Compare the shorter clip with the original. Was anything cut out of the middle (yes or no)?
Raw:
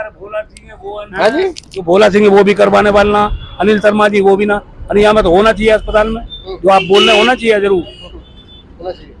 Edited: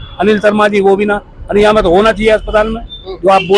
no